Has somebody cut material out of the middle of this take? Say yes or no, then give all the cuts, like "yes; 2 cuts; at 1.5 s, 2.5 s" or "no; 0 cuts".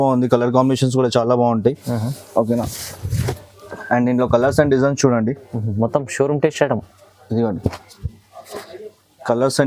no; 0 cuts